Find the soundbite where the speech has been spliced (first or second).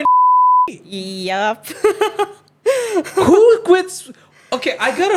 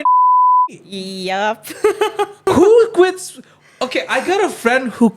second